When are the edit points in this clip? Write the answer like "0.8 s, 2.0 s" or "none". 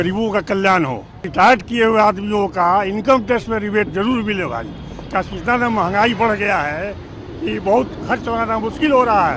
1.3 s